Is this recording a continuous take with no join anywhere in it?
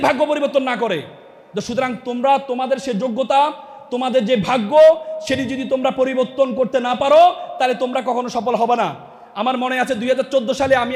yes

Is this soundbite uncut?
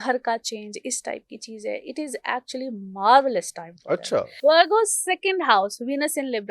no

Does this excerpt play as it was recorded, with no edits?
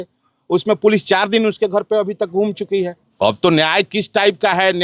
no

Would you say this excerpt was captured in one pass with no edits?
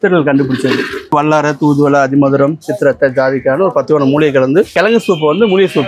no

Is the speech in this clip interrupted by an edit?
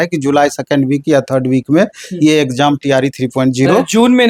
no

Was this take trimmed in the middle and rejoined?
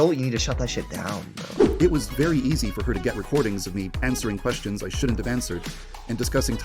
yes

